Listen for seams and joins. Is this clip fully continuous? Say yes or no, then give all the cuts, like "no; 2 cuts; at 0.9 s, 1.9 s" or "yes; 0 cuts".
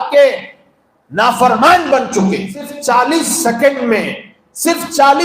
no; 1 cut; at 2.7 s